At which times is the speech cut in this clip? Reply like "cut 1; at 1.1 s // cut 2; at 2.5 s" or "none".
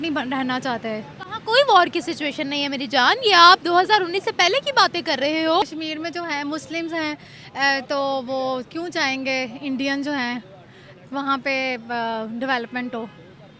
cut 1; at 5.6 s

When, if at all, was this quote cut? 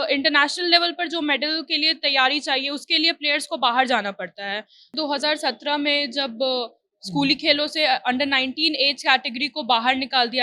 cut 1; at 4.9 s

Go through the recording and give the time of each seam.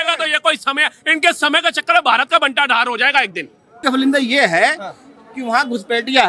cut 1; at 3.8 s

